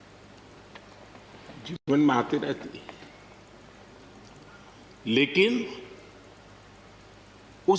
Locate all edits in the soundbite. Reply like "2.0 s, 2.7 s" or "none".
none